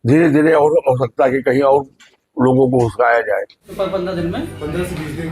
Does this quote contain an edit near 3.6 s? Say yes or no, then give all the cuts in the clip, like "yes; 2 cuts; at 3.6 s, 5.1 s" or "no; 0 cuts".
yes; 1 cut; at 3.6 s